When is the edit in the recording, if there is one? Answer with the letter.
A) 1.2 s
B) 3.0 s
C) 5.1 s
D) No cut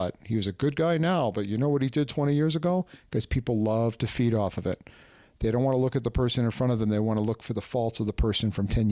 D